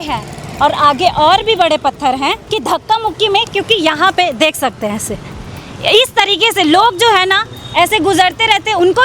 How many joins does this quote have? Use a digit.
1